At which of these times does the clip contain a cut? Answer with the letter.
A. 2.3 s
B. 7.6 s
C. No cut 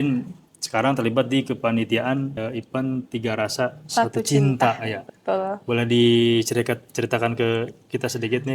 A